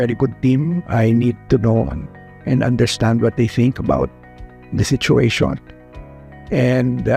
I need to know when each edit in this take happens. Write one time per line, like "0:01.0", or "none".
none